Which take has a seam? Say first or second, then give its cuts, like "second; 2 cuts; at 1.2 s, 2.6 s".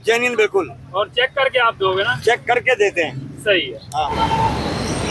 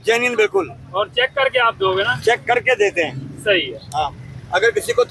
first; 1 cut; at 4.1 s